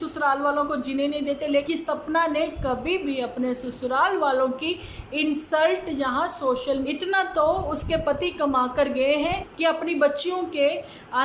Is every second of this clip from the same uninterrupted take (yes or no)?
no